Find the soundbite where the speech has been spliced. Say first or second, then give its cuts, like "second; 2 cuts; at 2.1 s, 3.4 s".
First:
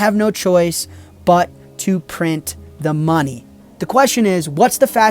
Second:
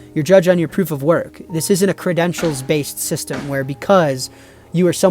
first; 1 cut; at 3.4 s